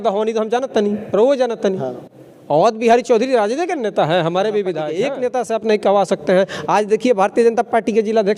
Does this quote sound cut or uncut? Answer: cut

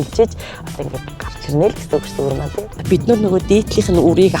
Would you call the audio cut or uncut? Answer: cut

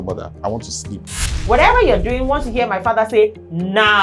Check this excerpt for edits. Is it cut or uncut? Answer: cut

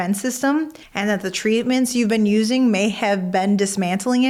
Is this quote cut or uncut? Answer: uncut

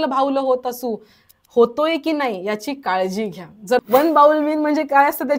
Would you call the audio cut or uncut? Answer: cut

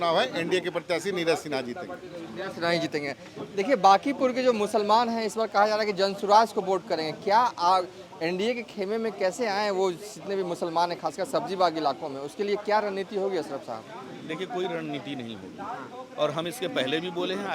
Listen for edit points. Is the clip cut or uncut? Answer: uncut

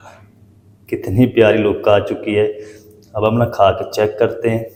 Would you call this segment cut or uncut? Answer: uncut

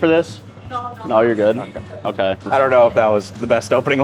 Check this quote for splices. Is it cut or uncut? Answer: uncut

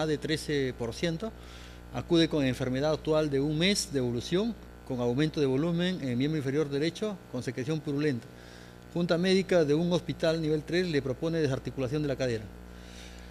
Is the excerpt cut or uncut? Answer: uncut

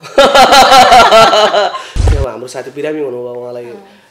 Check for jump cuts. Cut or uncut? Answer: cut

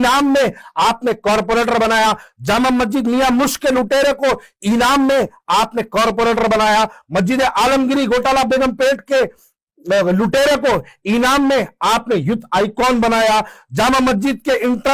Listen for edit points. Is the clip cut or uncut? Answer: uncut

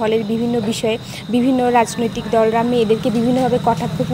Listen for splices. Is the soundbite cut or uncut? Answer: uncut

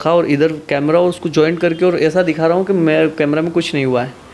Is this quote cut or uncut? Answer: uncut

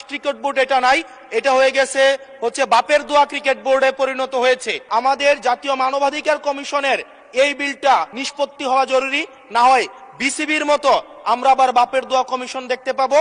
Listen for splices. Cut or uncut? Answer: cut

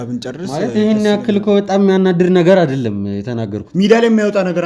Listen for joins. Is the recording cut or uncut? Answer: cut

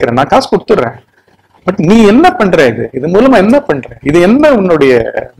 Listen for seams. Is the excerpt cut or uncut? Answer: uncut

